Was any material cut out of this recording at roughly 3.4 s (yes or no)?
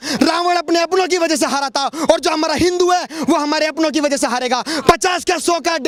no